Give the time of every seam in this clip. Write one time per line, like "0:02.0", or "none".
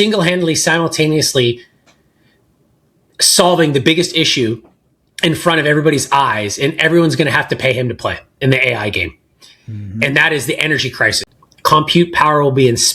0:11.2